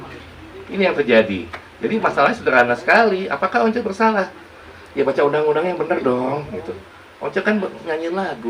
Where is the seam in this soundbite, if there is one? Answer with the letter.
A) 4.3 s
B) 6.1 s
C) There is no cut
C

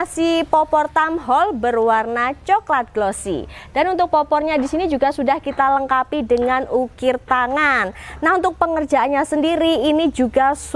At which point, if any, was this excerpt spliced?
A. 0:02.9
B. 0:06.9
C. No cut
C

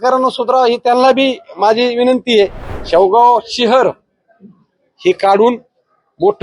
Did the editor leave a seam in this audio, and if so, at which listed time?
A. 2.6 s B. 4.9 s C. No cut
A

